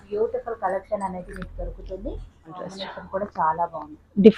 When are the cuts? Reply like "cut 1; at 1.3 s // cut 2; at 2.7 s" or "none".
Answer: cut 1; at 2.8 s